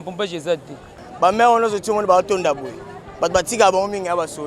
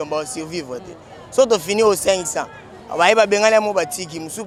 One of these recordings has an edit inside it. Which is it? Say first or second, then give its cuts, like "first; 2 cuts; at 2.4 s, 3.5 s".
first; 1 cut; at 1.0 s